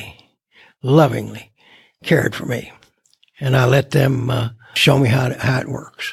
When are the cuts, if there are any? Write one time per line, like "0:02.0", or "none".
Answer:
0:04.7